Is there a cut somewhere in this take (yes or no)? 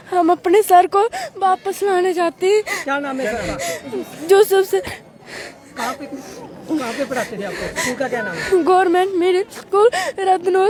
no